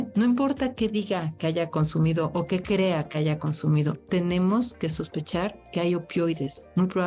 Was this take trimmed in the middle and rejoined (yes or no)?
no